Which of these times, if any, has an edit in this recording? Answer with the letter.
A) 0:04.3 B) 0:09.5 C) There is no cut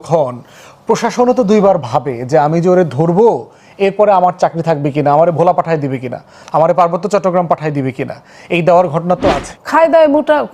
B